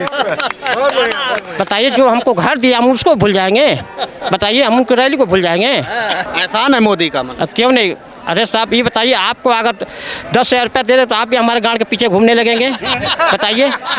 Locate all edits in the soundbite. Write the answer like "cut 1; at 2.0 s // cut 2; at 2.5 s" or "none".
cut 1; at 6.2 s